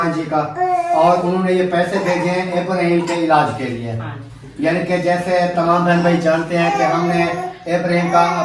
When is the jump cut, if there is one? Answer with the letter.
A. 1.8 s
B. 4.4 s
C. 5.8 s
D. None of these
D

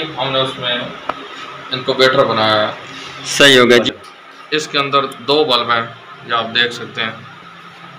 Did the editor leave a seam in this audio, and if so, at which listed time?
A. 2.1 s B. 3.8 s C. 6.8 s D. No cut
B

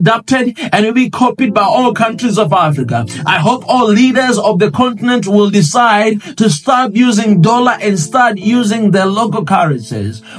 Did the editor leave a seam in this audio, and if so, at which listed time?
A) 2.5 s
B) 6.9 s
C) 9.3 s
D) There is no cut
D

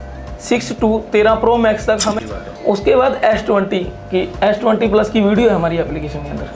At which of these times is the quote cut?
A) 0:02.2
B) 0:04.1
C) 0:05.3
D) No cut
A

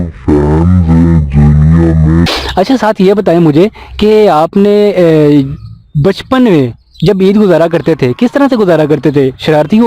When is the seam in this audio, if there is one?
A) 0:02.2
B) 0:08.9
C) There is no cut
A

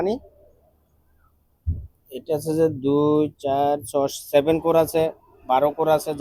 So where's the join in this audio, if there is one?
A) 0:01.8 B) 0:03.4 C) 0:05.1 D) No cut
D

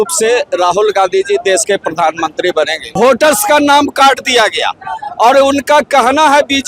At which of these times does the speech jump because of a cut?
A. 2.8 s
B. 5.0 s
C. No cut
A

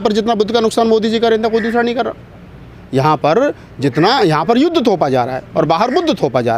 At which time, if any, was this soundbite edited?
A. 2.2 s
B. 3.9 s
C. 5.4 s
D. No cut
D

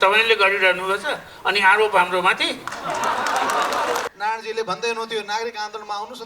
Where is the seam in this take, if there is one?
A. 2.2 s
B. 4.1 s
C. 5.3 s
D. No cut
B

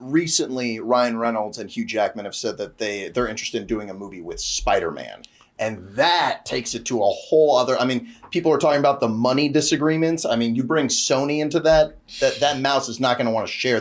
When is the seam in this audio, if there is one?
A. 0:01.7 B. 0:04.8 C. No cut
C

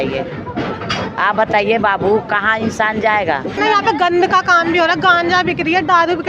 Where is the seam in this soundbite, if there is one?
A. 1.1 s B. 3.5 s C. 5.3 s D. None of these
B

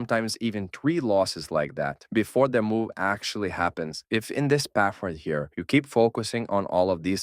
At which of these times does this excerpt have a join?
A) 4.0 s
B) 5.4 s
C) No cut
A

